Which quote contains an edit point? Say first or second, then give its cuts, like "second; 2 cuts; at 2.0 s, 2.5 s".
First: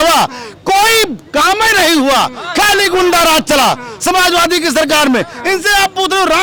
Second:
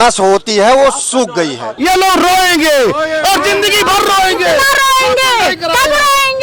second; 1 cut; at 1.7 s